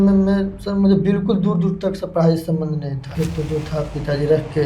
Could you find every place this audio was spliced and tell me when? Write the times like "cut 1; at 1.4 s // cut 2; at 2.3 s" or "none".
cut 1; at 3.1 s